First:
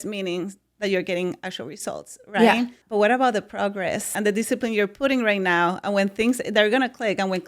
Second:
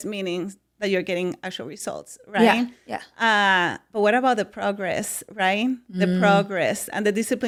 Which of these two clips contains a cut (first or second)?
first